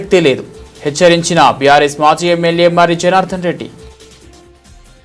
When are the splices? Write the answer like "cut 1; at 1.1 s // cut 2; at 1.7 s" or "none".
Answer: cut 1; at 3.7 s